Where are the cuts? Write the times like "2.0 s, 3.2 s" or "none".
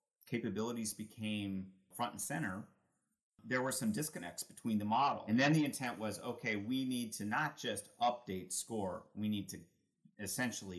1.9 s, 3.4 s, 5.2 s